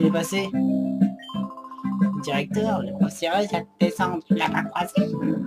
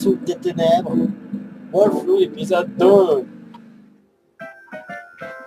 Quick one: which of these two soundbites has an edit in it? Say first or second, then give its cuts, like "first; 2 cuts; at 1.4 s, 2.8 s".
first; 1 cut; at 2.6 s